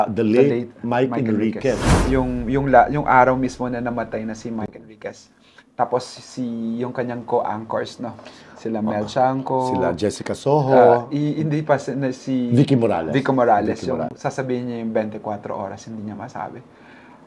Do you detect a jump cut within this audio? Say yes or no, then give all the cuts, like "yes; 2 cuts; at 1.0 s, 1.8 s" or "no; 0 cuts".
yes; 1 cut; at 2.1 s